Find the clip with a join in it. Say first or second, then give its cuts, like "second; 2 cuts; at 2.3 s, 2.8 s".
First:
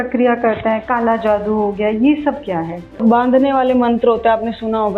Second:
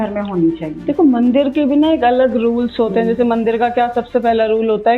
first; 1 cut; at 3.0 s